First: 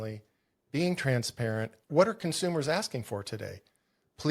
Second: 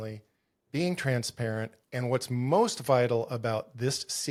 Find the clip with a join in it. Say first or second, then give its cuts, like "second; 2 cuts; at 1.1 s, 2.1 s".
first; 1 cut; at 1.8 s